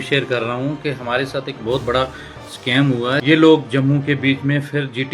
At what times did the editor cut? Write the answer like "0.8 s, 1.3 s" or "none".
3.2 s